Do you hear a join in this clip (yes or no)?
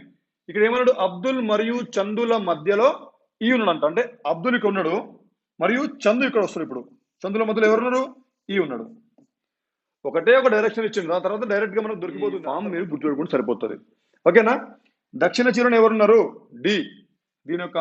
yes